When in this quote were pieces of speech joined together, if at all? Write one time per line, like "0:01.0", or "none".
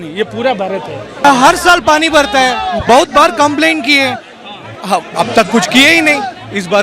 0:01.2